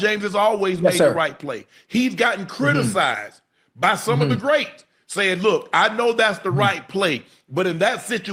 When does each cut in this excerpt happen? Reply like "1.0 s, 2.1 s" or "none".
none